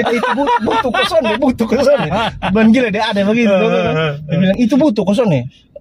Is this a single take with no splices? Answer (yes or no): yes